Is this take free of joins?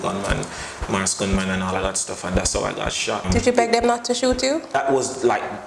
no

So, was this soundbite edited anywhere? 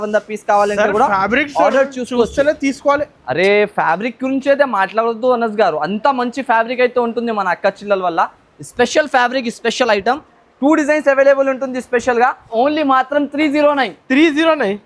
yes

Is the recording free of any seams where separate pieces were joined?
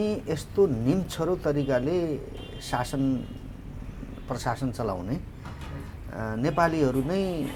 yes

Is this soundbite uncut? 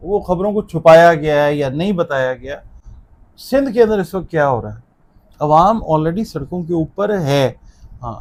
yes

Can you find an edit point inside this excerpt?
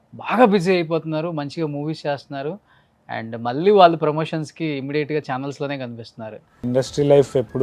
yes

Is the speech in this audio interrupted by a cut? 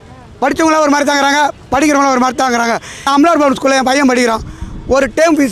yes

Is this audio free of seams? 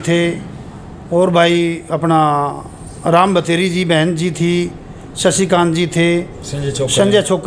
yes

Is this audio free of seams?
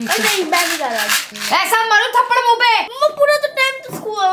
no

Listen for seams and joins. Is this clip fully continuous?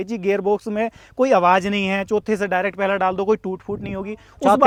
yes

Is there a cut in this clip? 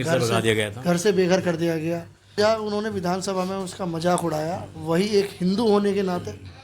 yes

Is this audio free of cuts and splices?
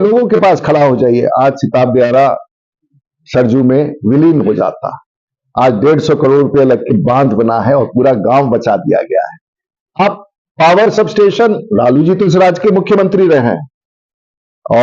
yes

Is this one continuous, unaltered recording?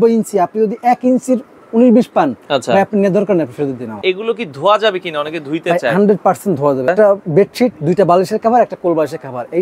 no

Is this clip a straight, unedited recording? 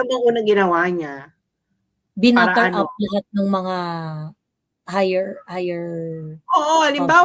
yes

